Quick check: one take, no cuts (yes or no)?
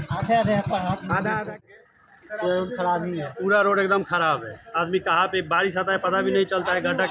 no